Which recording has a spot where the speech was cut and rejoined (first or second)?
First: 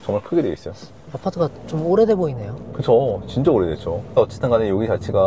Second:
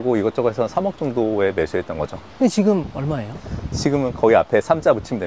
second